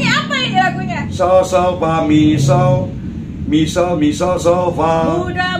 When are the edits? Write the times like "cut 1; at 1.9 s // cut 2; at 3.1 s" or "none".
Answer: cut 1; at 1.0 s